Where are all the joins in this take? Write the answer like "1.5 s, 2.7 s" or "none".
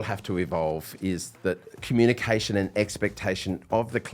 1.7 s